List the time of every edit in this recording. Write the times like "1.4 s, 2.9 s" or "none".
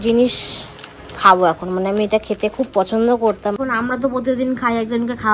3.6 s